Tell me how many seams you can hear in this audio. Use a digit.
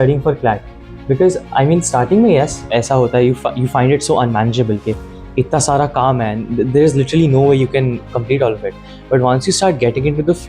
0